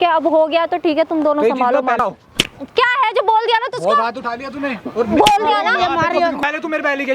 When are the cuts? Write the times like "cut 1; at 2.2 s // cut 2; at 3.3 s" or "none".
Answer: cut 1; at 2.0 s // cut 2; at 6.4 s